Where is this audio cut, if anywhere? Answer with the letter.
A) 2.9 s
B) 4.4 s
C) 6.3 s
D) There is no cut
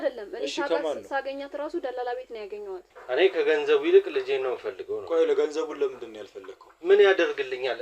A